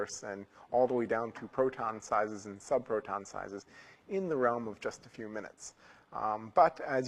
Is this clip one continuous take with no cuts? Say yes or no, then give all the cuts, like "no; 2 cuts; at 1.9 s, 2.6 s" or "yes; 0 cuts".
yes; 0 cuts